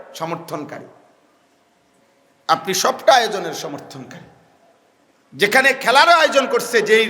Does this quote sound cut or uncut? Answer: cut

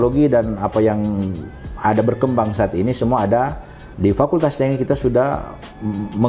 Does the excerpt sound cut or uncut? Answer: uncut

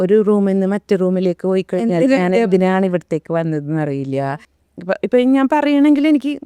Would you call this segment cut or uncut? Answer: cut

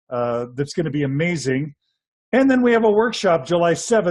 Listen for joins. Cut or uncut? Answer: uncut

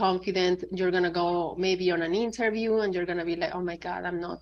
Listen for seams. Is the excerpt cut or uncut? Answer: uncut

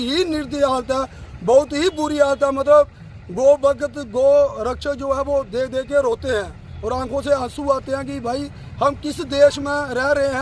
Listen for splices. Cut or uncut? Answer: uncut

